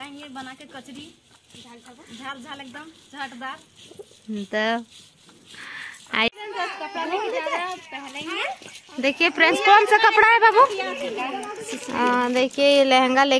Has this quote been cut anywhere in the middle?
yes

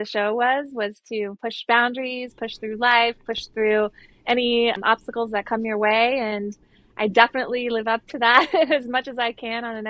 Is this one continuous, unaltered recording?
yes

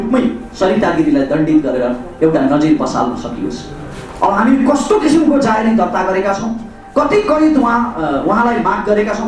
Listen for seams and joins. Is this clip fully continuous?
yes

